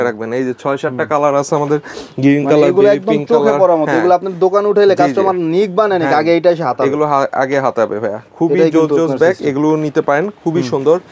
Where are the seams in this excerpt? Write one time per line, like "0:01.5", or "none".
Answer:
none